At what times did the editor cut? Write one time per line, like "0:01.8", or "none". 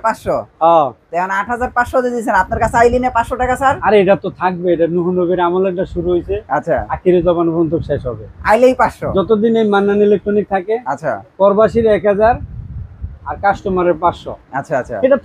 none